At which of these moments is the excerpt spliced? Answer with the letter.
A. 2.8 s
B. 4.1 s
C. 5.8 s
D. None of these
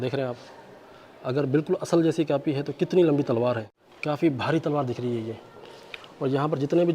B